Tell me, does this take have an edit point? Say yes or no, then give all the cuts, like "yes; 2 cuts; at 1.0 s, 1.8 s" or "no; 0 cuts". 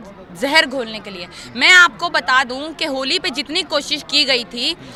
no; 0 cuts